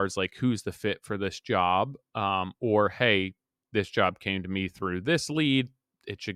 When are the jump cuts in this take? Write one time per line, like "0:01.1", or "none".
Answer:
none